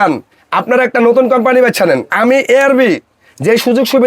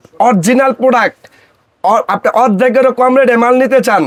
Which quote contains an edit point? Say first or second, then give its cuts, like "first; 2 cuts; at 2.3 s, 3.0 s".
first; 1 cut; at 2.1 s